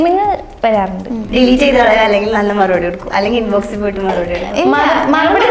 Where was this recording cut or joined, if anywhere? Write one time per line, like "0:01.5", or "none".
0:01.1

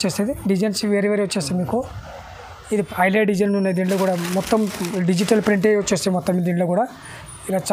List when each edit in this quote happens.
0:02.8

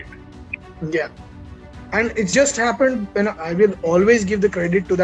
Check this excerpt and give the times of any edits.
0:02.3
0:03.4

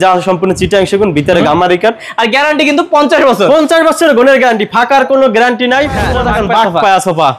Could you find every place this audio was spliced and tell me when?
0:02.1
0:06.1

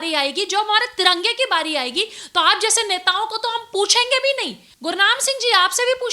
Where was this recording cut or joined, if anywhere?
0:04.7

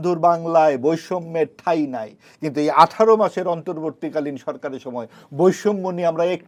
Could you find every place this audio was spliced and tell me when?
none

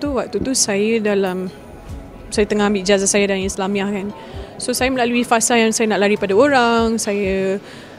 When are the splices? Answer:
none

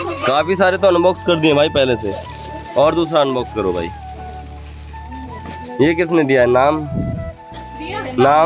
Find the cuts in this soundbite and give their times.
none

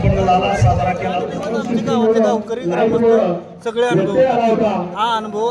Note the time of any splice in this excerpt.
0:01.4

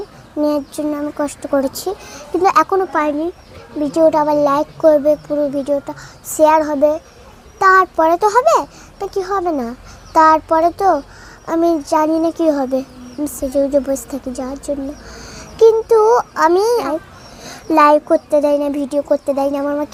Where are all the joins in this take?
none

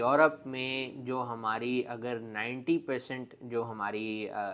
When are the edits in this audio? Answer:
none

